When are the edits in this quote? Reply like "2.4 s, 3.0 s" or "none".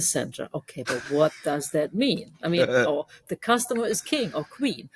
none